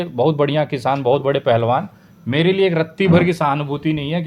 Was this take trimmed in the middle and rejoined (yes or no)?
no